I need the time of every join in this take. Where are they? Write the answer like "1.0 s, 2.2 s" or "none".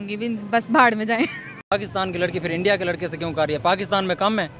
1.6 s